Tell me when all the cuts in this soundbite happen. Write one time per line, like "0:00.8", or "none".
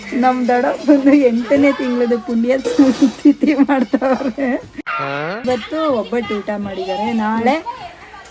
0:04.7